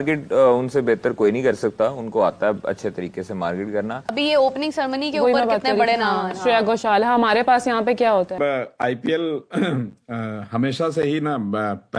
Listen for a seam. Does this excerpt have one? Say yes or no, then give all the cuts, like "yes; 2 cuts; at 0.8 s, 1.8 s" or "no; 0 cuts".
yes; 2 cuts; at 4.1 s, 8.3 s